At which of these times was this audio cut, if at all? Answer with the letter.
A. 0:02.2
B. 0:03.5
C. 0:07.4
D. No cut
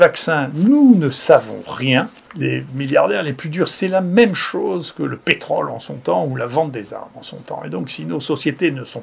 A